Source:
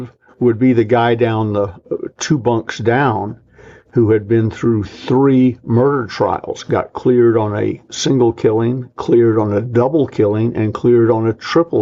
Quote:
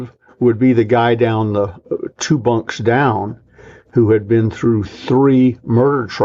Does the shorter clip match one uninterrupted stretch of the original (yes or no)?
yes